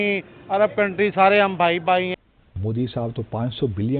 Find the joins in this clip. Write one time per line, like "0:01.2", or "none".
0:02.1